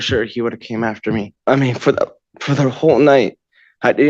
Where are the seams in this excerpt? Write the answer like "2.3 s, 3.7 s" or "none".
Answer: 1.3 s